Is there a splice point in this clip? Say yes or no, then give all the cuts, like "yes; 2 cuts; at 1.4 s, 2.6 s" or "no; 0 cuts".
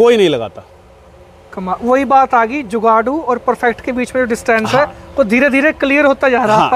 no; 0 cuts